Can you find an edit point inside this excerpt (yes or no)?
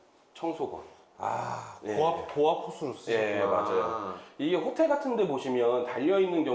no